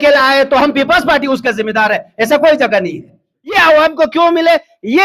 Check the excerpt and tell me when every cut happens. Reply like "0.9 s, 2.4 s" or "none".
3.6 s